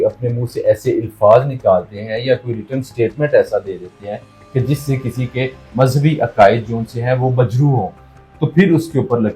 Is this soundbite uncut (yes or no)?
yes